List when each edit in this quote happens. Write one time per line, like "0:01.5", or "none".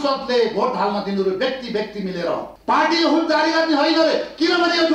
0:02.5